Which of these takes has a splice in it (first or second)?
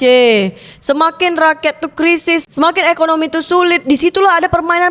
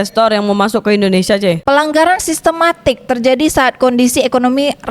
second